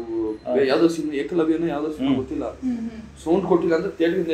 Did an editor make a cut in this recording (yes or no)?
no